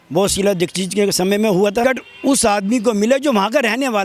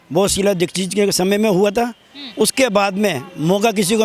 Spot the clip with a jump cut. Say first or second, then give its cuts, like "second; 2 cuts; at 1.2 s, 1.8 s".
first; 1 cut; at 1.8 s